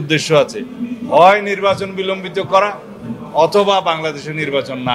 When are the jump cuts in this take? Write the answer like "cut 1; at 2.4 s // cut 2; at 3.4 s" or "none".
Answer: none